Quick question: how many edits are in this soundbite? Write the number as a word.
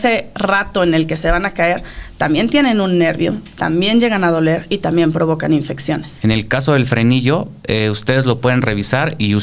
one